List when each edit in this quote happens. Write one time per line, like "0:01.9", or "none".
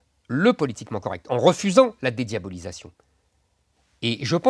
none